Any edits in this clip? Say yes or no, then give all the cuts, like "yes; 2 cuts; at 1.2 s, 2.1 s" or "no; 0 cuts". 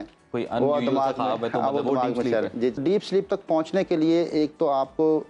yes; 1 cut; at 2.8 s